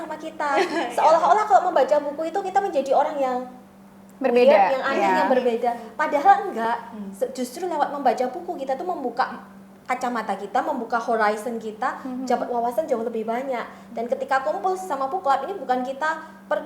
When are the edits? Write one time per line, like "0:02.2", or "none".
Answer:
none